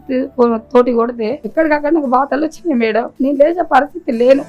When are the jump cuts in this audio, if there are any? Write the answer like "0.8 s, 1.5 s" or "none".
1.4 s, 3.1 s